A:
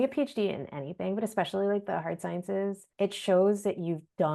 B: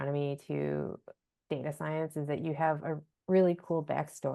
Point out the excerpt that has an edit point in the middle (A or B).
A